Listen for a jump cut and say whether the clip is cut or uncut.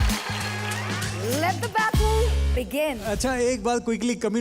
cut